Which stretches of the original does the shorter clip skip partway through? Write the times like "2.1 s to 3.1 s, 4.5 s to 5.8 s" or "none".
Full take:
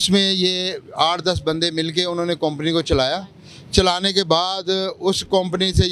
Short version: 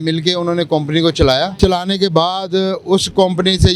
3.2 s to 3.7 s